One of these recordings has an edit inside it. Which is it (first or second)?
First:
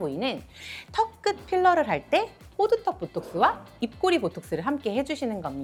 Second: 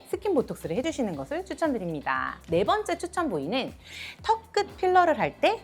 second